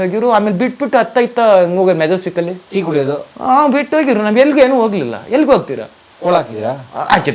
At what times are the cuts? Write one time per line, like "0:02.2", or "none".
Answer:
none